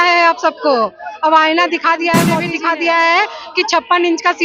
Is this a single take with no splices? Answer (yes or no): no